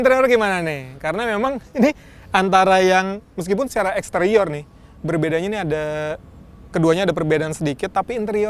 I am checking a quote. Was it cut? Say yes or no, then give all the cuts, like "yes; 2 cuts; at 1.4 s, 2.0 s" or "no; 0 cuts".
no; 0 cuts